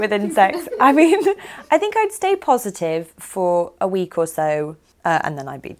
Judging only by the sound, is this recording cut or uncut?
cut